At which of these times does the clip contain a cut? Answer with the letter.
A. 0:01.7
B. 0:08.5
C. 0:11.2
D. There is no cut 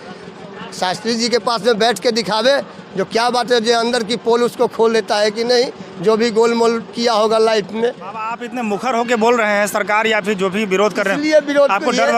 B